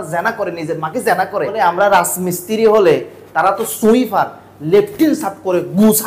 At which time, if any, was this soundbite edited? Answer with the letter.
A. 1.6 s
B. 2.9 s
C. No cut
A